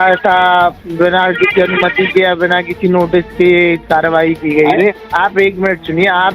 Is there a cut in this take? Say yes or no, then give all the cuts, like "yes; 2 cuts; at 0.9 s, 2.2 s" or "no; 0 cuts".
yes; 1 cut; at 4.9 s